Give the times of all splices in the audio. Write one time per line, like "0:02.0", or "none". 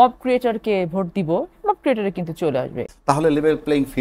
0:02.9

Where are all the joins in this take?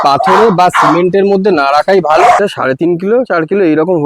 0:02.4

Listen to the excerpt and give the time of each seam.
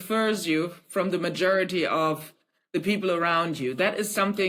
none

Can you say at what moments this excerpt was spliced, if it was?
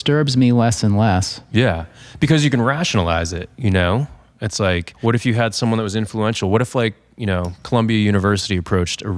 0:04.9

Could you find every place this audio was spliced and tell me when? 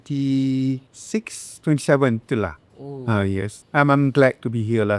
0:00.9
0:03.6

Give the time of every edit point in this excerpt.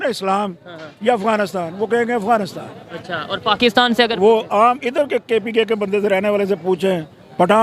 none

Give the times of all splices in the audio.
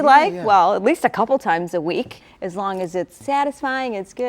0:02.2
0:03.2

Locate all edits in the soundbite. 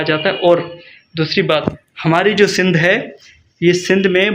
none

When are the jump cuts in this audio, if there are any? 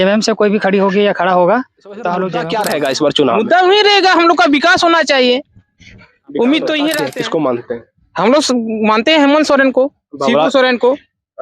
0:02.4
0:07.1

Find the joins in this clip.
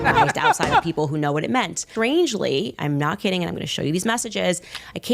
0:01.8

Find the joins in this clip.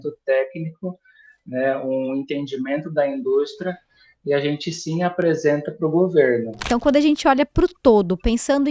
0:06.7

